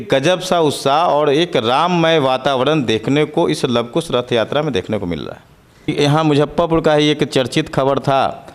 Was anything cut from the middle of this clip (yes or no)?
yes